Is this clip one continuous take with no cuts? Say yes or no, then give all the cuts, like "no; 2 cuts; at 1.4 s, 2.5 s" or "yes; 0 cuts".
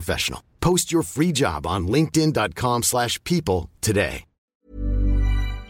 no; 1 cut; at 4.7 s